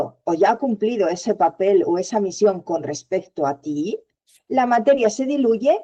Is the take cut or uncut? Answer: uncut